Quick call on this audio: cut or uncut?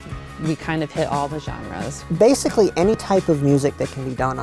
cut